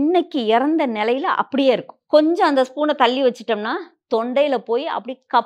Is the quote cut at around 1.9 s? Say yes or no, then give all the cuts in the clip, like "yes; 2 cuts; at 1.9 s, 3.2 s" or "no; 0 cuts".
yes; 1 cut; at 1.9 s